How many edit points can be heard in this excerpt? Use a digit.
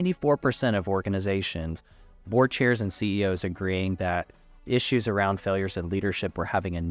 0